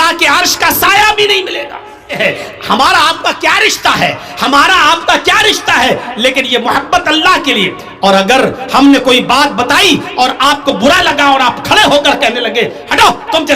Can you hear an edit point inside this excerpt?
yes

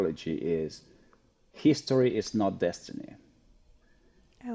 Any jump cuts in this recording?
no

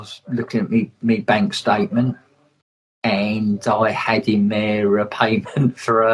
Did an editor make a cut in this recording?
no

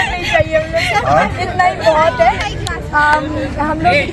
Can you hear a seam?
no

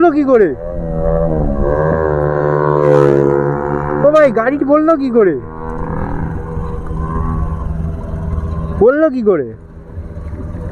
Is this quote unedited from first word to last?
yes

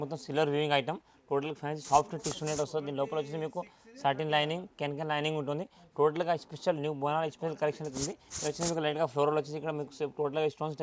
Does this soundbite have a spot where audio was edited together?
no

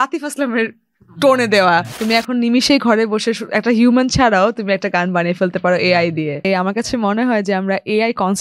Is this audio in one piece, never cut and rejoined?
no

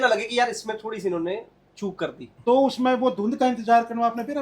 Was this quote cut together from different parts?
yes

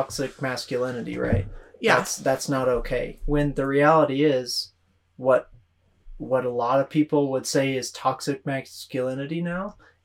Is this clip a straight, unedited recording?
yes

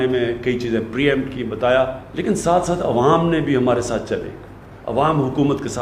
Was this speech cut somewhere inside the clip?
yes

